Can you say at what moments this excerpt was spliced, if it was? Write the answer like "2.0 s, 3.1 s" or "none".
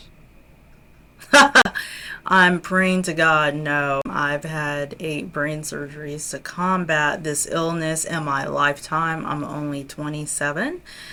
none